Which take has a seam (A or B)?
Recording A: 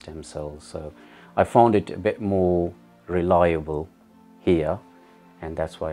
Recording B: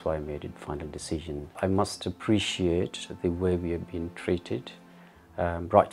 B